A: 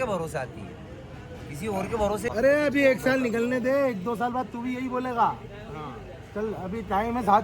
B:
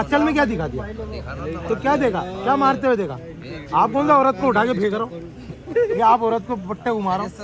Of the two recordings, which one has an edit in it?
A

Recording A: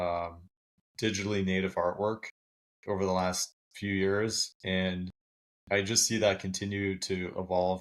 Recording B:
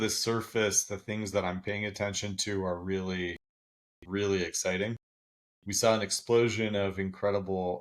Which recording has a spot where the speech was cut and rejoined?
B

